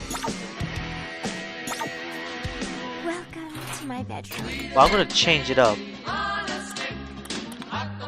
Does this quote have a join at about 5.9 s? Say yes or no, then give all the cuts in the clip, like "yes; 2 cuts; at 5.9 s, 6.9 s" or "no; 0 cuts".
yes; 1 cut; at 5.9 s